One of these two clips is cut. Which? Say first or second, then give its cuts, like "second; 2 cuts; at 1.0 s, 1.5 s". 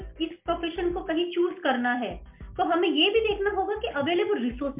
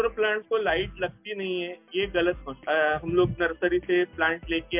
second; 1 cut; at 2.6 s